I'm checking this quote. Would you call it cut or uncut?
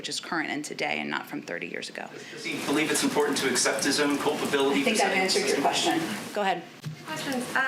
uncut